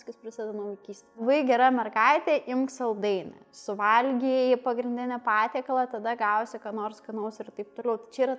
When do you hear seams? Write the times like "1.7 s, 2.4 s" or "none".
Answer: 1.2 s